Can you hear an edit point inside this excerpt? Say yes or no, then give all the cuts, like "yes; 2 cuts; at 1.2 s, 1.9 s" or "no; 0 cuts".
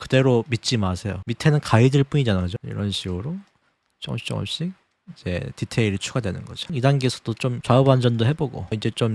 yes; 2 cuts; at 2.6 s, 6.7 s